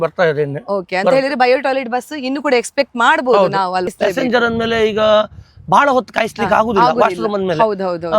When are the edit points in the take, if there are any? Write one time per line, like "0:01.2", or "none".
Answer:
0:03.9